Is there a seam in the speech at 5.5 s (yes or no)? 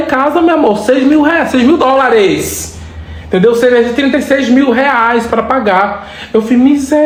no